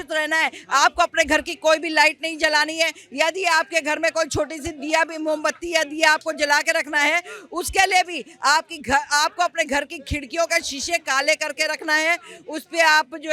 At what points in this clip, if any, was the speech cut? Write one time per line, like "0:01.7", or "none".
none

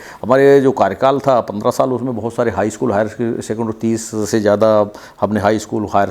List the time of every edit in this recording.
none

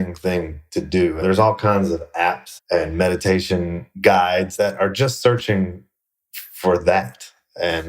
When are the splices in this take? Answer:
0:01.2
0:02.5

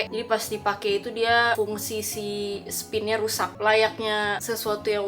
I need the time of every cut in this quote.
0:03.5

